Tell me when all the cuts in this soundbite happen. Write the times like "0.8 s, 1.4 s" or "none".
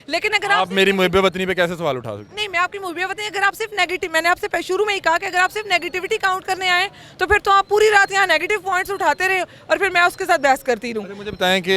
none